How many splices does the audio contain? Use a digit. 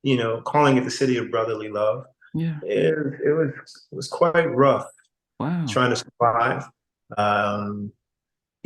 1